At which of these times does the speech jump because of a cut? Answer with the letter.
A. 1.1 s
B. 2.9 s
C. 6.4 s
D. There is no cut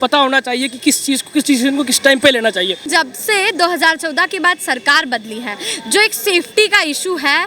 B